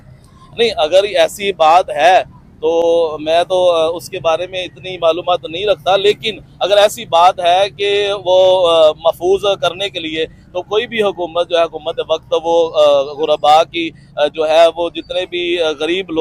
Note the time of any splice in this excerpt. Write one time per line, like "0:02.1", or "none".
none